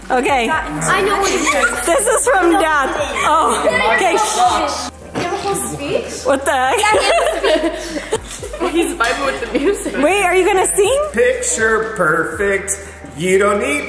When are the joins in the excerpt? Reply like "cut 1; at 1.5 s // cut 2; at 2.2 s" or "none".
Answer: cut 1; at 11.1 s